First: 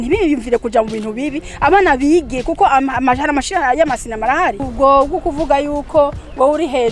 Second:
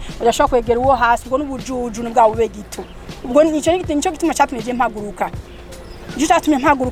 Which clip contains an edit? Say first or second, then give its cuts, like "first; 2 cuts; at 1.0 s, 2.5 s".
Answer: first; 1 cut; at 4.7 s